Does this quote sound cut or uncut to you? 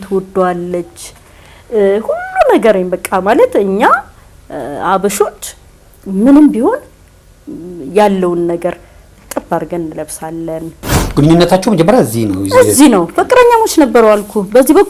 cut